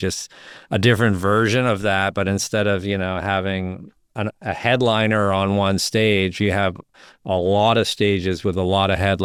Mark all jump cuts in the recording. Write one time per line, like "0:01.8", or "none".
none